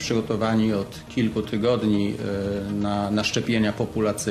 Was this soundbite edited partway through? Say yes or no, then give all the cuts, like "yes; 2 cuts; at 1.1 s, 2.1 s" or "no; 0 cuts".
no; 0 cuts